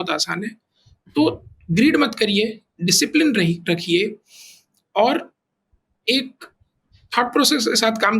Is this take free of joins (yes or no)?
yes